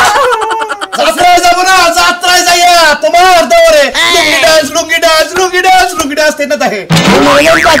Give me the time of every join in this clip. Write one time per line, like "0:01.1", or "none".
0:00.9
0:06.9